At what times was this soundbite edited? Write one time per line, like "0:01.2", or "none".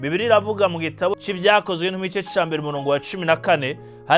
0:01.2